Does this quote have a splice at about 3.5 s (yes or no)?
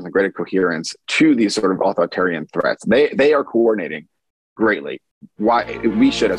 no